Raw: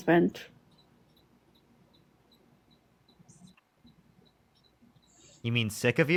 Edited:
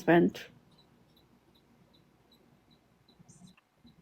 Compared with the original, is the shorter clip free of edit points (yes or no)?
yes